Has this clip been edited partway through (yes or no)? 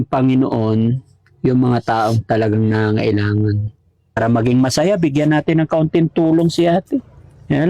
yes